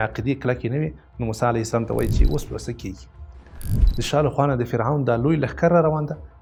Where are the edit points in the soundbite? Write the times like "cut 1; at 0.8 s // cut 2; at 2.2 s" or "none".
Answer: none